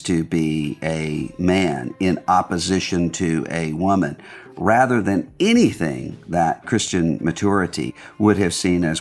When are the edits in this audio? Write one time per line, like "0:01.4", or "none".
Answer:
0:07.9